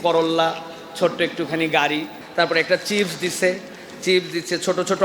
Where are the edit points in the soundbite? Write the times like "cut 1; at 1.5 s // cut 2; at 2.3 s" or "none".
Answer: cut 1; at 2.2 s